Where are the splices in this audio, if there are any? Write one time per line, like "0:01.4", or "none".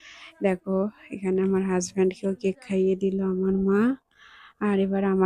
none